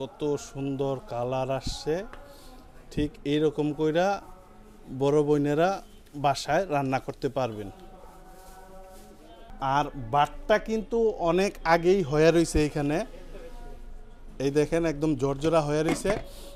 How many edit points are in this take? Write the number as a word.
zero